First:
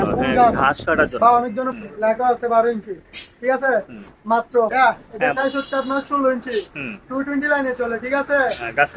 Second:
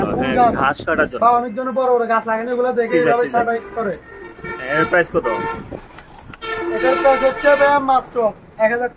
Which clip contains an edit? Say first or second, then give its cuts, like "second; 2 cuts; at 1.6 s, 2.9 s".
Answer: first; 2 cuts; at 1.7 s, 4.7 s